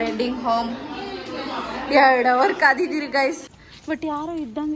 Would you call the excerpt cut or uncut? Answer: cut